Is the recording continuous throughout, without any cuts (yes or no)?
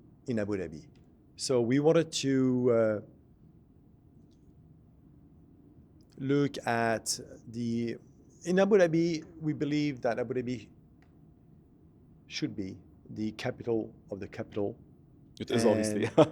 yes